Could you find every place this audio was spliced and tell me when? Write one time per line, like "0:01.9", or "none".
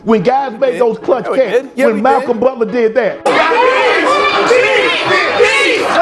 0:03.2